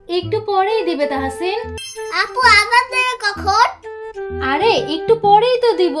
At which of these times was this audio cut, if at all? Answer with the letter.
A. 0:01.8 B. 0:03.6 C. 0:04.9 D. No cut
A